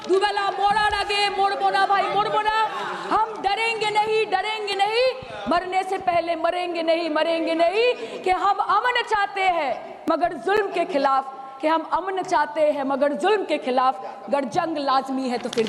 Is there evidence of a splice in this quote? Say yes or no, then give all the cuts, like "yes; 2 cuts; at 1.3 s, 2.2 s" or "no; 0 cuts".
no; 0 cuts